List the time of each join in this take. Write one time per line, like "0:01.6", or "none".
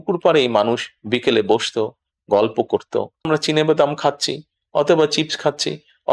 0:03.3